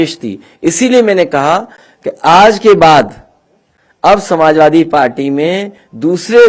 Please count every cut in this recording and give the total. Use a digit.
0